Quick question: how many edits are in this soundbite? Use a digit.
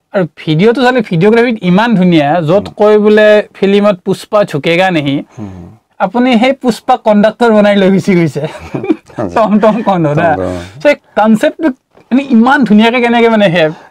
0